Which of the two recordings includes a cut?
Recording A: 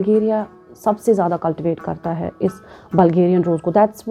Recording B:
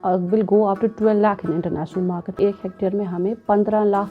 B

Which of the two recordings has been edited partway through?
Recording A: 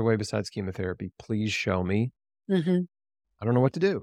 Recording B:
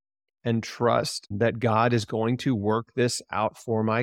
B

